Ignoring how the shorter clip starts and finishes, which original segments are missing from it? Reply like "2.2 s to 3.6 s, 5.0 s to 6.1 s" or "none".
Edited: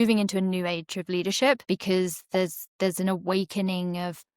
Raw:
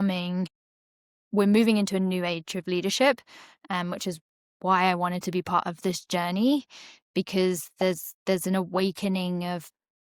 3.2 s to 7.1 s